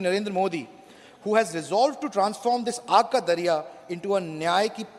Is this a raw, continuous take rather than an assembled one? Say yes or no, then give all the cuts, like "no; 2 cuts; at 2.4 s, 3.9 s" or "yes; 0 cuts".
yes; 0 cuts